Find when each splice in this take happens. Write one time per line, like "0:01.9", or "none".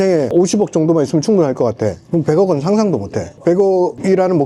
none